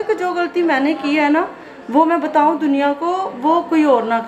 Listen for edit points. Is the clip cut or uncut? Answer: uncut